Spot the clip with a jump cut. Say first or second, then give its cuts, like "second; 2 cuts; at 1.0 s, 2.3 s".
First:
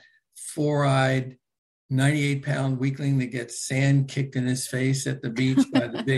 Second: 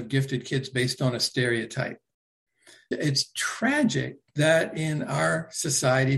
second; 1 cut; at 2.8 s